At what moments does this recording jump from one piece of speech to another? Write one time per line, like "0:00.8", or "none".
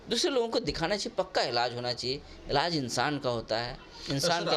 none